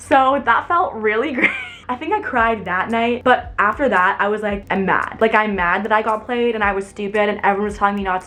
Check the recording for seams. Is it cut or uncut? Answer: uncut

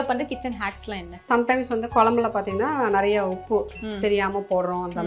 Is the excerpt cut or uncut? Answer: uncut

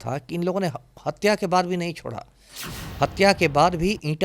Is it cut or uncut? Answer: uncut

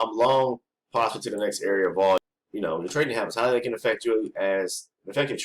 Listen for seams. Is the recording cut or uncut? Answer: cut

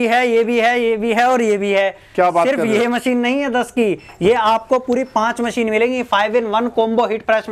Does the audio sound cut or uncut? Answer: uncut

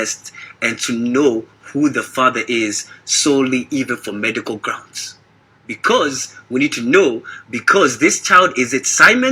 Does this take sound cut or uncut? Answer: uncut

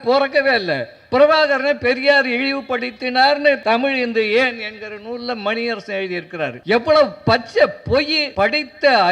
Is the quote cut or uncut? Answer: cut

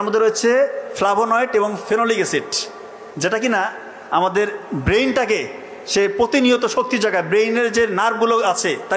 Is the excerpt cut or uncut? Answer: uncut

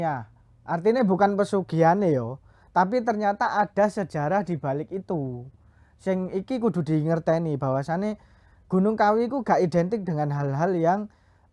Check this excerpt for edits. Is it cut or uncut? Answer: uncut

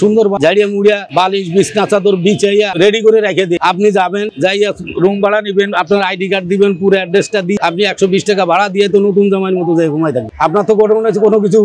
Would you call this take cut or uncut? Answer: uncut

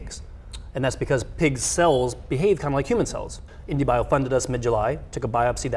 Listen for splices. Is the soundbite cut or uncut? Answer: cut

